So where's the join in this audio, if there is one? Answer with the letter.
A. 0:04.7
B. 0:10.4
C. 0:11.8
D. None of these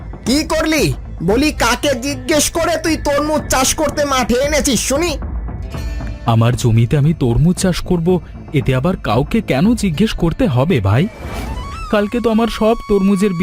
C